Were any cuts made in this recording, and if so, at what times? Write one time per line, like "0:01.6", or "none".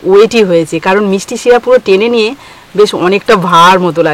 none